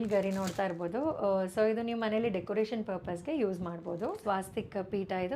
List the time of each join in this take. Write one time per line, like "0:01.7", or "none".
0:04.2